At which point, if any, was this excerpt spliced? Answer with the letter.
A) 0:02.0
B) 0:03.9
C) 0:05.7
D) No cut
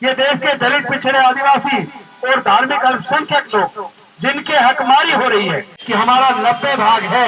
C